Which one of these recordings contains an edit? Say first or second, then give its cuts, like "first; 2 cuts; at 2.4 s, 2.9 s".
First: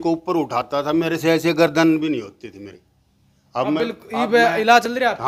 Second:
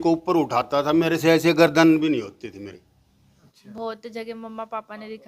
second; 1 cut; at 3.4 s